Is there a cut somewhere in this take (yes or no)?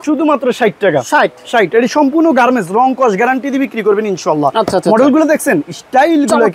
no